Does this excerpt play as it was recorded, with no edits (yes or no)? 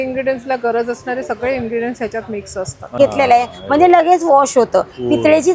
no